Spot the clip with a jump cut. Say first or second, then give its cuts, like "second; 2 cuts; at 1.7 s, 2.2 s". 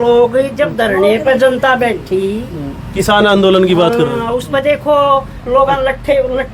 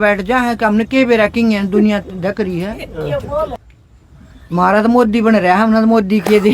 second; 1 cut; at 3.5 s